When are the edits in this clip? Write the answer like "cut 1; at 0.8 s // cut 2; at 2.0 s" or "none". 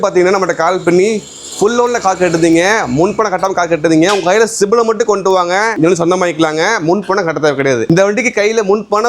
cut 1; at 7.8 s

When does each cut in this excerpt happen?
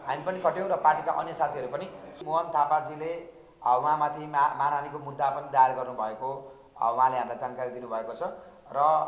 cut 1; at 2.1 s

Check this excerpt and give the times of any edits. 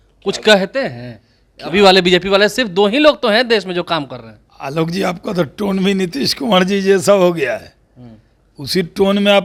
none

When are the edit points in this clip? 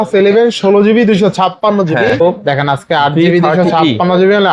cut 1; at 2.2 s

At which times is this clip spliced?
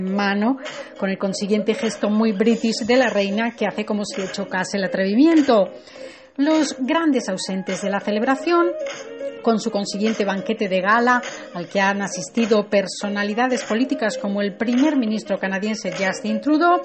cut 1; at 8.9 s

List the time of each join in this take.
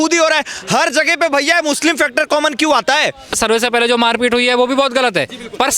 cut 1; at 3.4 s

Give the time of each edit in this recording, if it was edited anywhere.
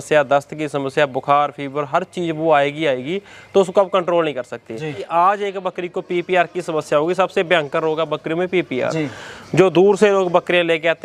cut 1; at 5.0 s

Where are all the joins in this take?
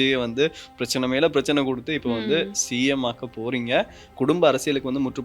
cut 1; at 4.0 s

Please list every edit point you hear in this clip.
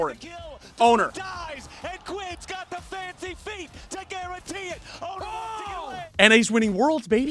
none

